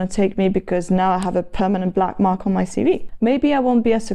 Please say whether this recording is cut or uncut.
cut